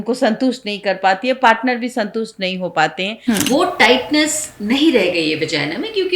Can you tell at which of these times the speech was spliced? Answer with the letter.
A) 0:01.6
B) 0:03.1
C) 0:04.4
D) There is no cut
B